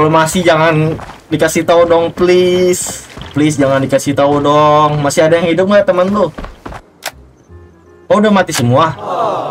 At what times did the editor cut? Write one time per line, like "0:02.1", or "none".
none